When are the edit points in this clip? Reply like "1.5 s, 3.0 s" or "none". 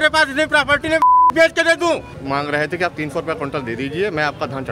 2.1 s